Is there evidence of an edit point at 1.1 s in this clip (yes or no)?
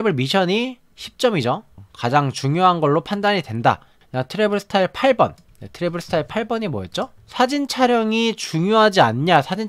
no